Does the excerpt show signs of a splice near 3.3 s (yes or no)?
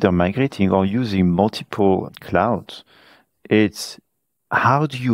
no